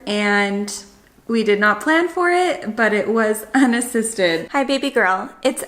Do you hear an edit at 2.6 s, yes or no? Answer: no